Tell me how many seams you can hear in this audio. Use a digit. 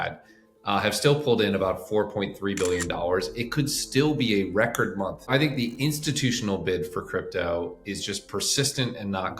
1